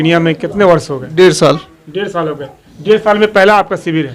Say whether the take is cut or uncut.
uncut